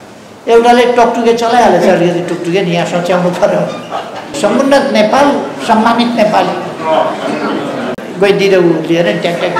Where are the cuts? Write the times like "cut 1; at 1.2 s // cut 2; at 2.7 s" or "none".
cut 1; at 4.3 s // cut 2; at 7.9 s